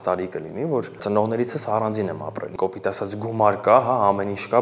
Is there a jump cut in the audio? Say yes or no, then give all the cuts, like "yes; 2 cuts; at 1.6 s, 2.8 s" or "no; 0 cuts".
yes; 2 cuts; at 1.0 s, 2.5 s